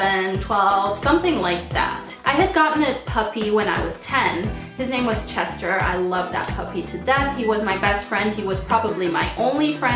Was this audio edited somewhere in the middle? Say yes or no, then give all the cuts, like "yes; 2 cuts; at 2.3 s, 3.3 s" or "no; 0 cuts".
yes; 1 cut; at 4.8 s